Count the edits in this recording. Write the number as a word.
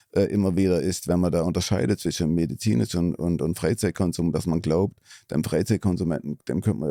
zero